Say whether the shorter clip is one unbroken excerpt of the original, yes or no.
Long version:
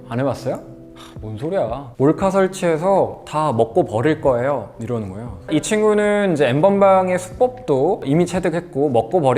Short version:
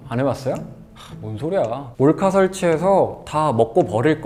yes